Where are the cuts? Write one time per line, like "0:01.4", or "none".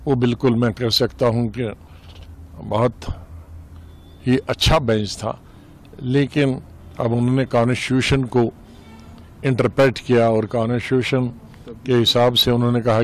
none